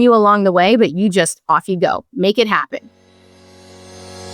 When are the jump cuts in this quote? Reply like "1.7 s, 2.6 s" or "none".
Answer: 3.1 s